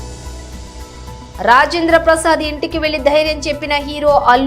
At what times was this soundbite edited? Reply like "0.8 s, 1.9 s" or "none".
0.9 s